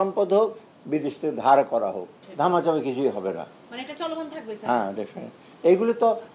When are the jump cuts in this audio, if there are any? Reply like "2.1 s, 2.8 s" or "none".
2.1 s